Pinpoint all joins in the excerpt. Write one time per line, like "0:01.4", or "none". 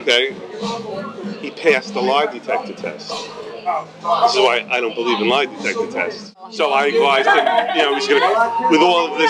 0:06.5

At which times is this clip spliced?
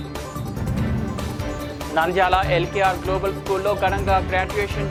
none

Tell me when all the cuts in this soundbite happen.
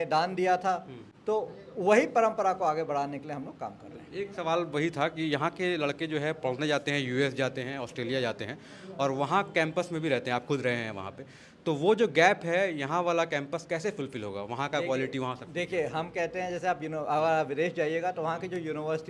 none

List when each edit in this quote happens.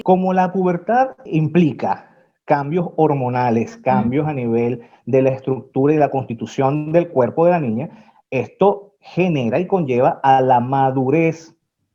0:01.2

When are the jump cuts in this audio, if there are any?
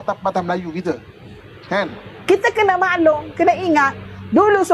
0:02.1

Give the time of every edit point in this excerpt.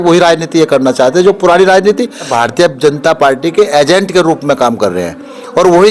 0:02.3

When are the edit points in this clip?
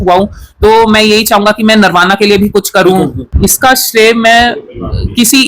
0:03.2

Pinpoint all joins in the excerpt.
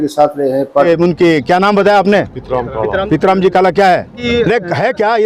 0:00.9
0:04.1

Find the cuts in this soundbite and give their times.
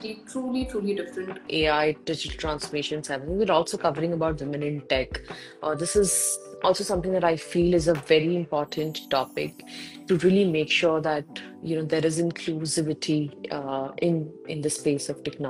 0:01.5

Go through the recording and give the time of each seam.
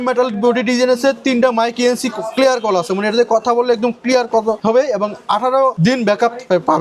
0:04.6
0:05.8

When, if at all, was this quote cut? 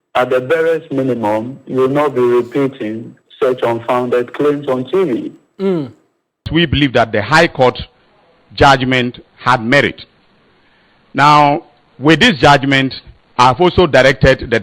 0:06.5

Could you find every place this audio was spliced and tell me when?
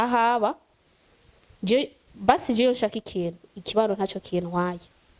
none

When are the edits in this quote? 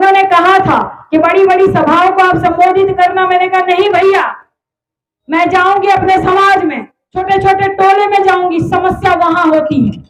none

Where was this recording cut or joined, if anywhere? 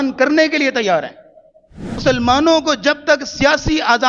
0:02.0

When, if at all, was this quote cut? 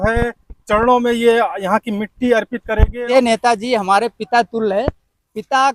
0:03.1

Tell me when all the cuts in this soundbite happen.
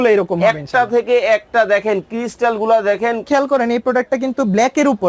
0:03.2

